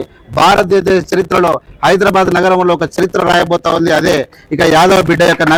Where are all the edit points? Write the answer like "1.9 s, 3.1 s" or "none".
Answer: none